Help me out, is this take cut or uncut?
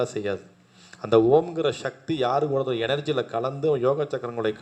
uncut